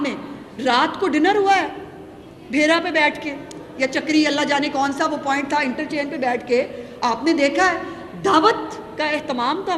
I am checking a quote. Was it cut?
no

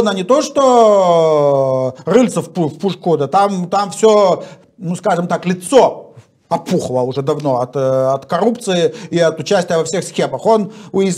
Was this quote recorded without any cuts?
yes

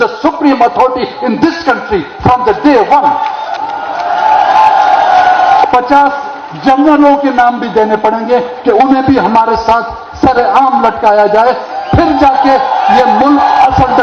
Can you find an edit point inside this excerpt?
yes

